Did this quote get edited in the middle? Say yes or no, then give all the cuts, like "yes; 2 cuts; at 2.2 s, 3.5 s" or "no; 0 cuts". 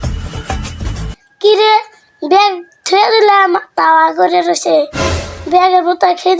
no; 0 cuts